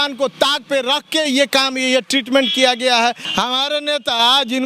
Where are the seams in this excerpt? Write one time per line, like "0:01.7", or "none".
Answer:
0:03.2